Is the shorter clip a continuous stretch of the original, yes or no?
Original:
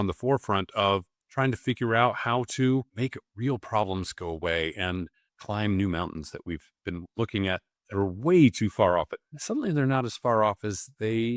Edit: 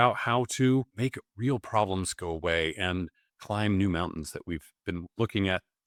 yes